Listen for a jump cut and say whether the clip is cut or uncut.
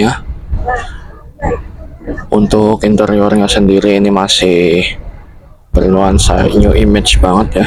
uncut